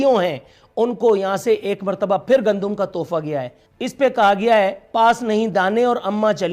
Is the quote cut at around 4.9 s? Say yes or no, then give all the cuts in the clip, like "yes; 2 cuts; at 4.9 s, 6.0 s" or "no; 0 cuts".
no; 1 cut; at 3.6 s